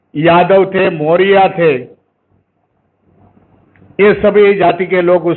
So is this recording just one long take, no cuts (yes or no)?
yes